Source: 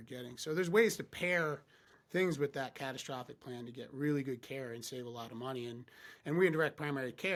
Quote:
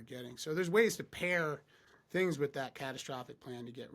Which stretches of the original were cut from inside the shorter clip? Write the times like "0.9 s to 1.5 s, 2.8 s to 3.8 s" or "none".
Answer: none